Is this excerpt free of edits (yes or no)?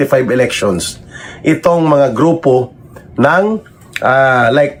yes